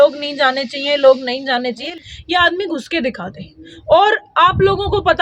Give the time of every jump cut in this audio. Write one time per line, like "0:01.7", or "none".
0:01.9